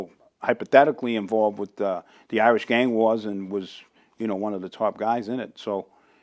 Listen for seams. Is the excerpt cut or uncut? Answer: uncut